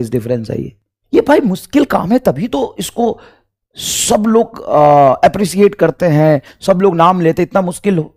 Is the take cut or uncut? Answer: uncut